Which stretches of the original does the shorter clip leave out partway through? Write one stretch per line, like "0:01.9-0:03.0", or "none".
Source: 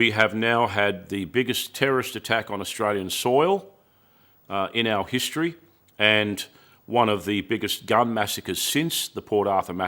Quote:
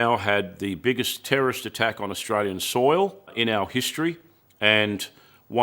0:03.8-0:04.7